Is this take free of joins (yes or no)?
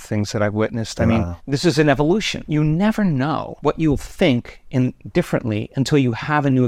no